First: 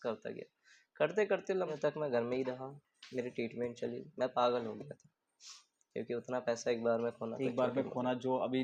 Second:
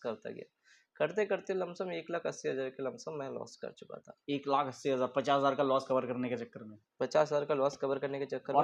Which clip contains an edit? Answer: first; 1 cut; at 1.7 s

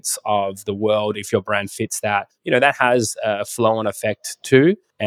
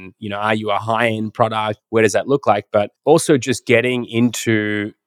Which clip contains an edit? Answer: second; 1 cut; at 1.8 s

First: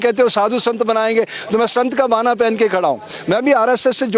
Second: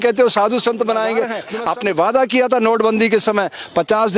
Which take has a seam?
second; 1 cut; at 1.5 s

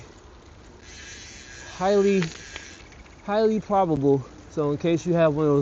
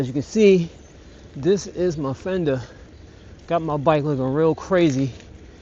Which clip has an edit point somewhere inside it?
first; 1 cut; at 4.4 s

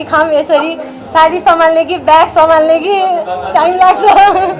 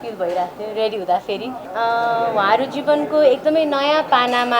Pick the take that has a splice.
second; 1 cut; at 1.6 s

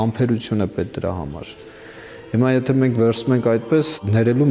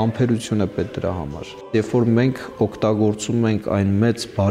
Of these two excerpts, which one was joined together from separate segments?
second; 1 cut; at 1.7 s

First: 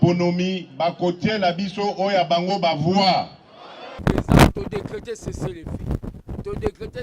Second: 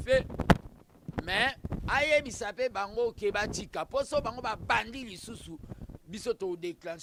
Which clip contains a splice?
first; 1 cut; at 3.9 s

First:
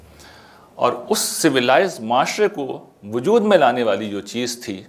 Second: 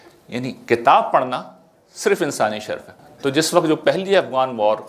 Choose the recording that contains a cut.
second; 1 cut; at 2.9 s

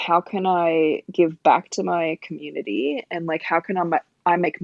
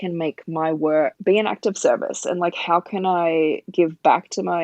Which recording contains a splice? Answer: second; 1 cut; at 1.2 s

